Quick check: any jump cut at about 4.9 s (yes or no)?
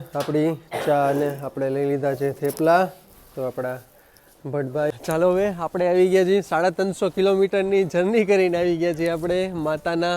yes